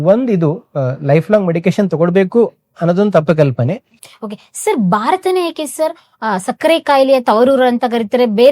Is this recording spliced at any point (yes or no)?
yes